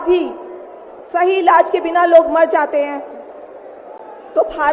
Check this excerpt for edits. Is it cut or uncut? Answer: uncut